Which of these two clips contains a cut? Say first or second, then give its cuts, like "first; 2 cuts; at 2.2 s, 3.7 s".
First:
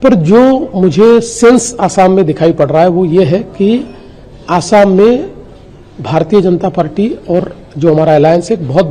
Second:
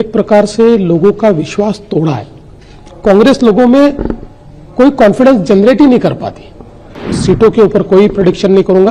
second; 1 cut; at 7.0 s